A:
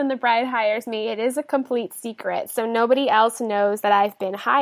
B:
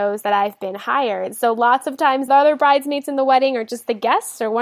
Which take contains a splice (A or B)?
B